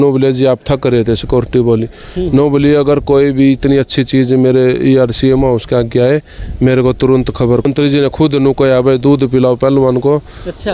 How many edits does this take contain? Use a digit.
1